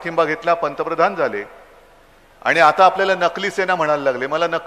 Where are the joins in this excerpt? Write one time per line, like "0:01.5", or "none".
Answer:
0:00.9